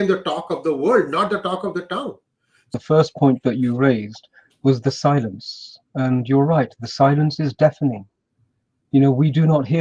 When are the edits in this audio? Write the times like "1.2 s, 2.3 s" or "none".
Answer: 2.7 s